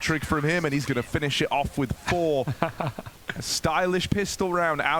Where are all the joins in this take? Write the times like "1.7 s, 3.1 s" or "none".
none